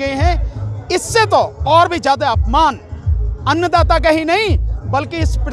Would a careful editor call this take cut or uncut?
uncut